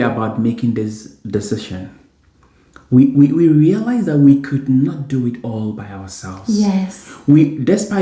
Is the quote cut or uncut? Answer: uncut